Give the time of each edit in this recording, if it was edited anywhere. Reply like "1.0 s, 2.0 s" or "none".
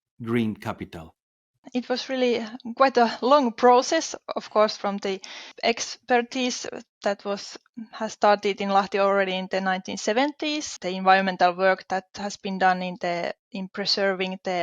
1.6 s, 5.5 s, 10.7 s